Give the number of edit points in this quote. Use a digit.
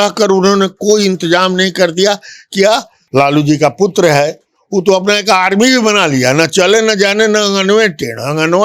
1